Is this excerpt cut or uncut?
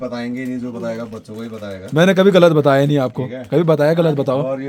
uncut